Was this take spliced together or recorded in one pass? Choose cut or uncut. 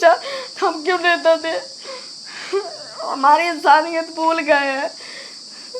uncut